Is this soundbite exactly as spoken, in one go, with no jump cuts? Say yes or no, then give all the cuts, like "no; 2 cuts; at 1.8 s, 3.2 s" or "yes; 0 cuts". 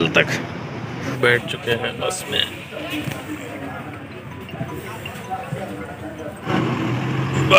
no; 2 cuts; at 1.1 s, 6.4 s